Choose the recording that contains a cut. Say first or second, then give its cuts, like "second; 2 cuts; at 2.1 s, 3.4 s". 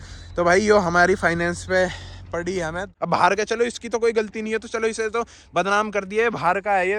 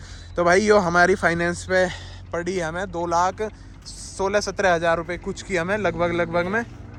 first; 1 cut; at 2.8 s